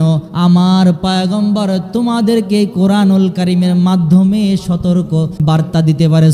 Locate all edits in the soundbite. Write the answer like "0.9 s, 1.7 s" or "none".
5.4 s